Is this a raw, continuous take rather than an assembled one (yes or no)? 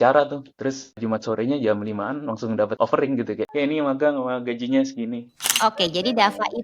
no